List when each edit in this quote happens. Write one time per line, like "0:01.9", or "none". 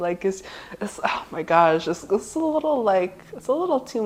none